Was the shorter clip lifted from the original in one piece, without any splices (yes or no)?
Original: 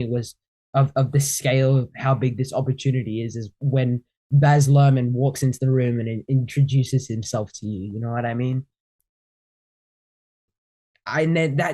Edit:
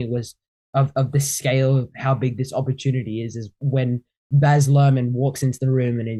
yes